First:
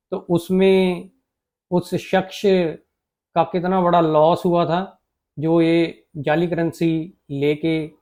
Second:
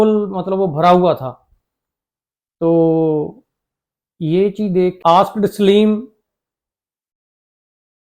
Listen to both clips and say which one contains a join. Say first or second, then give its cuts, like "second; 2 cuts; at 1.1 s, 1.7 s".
second; 1 cut; at 5.0 s